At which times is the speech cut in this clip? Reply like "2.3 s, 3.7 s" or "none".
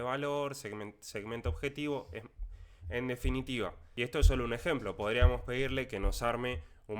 3.8 s